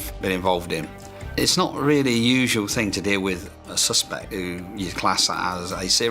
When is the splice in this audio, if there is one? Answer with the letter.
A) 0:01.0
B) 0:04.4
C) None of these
B